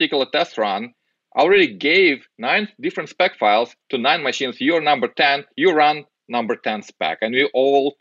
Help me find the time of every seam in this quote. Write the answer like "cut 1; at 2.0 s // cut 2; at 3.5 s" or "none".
cut 1; at 2.3 s // cut 2; at 3.8 s